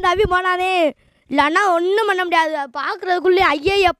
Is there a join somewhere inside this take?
no; 0 cuts

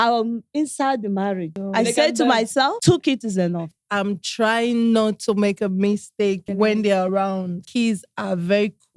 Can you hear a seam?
yes; 5 cuts; at 1.6 s, 2.8 s, 3.8 s, 6.5 s, 7.7 s

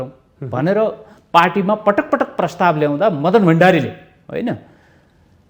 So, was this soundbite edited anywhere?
no; 0 cuts

